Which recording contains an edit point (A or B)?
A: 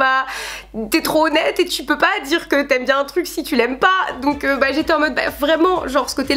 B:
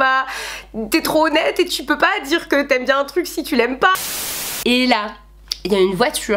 B